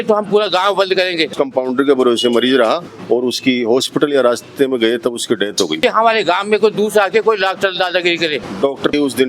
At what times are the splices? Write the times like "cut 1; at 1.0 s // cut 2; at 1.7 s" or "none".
cut 1; at 1.3 s // cut 2; at 2.9 s // cut 3; at 5.8 s // cut 4; at 8.4 s

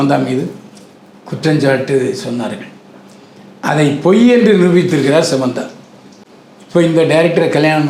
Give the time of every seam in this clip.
none

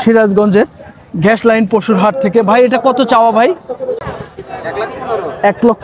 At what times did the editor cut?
cut 1; at 4.0 s

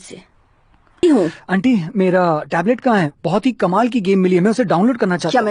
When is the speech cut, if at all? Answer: cut 1; at 1.0 s

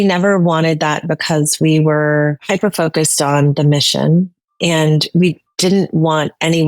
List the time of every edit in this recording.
cut 1; at 2.4 s

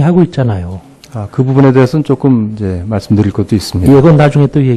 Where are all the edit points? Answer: cut 1; at 1.9 s

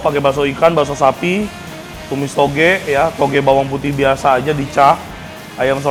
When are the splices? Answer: none

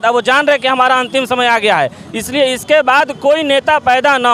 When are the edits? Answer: none

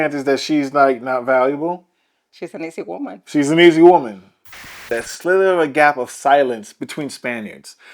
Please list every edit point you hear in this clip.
cut 1; at 4.9 s

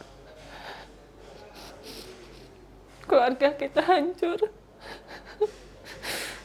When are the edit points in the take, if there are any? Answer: none

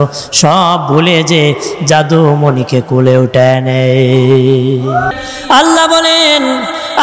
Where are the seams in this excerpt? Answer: cut 1; at 5.1 s

